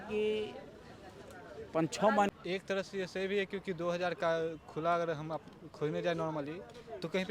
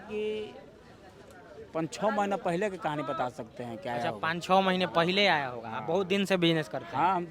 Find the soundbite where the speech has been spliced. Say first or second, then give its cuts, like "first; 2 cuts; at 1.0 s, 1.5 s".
first; 1 cut; at 2.3 s